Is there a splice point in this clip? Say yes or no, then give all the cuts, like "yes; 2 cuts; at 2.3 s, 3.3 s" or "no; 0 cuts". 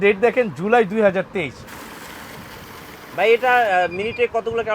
yes; 1 cut; at 1.7 s